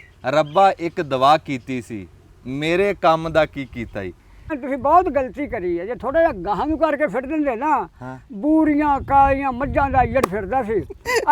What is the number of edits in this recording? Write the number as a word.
one